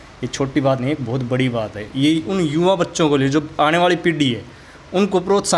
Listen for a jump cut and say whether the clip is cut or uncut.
uncut